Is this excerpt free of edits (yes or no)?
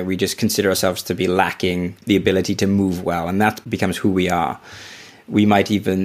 no